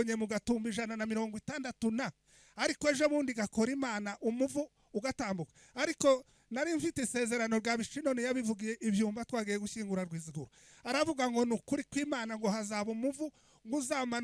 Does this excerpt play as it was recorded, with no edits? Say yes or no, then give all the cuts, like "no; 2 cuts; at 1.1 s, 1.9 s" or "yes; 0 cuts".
yes; 0 cuts